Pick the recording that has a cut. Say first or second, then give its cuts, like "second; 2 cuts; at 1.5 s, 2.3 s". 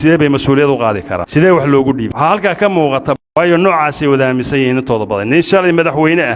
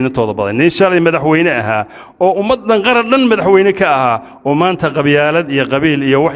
first; 3 cuts; at 1.1 s, 2.1 s, 3.2 s